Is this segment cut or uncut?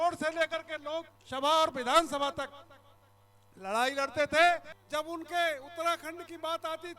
cut